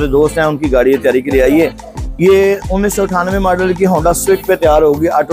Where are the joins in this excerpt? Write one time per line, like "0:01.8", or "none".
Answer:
none